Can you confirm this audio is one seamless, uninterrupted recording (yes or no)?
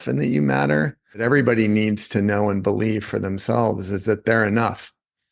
no